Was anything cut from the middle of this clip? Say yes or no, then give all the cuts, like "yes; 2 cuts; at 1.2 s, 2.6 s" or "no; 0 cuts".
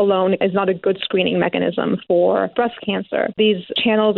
no; 0 cuts